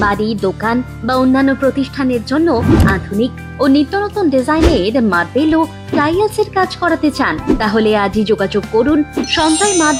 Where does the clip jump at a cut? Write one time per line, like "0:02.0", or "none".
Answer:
none